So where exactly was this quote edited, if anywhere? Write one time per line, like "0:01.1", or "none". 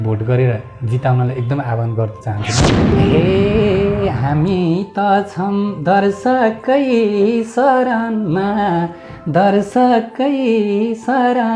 0:02.9